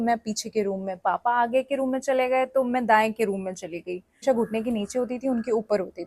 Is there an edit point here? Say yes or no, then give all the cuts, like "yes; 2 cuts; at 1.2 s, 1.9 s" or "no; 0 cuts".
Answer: yes; 1 cut; at 4.2 s